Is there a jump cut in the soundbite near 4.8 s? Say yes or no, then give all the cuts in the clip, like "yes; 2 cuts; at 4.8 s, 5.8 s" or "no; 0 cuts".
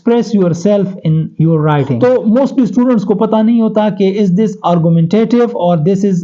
no; 1 cut; at 1.9 s